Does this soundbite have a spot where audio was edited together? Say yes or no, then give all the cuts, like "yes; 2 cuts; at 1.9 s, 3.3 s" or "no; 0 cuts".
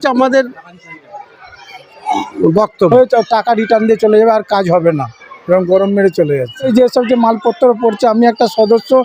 yes; 2 cuts; at 2.9 s, 6.7 s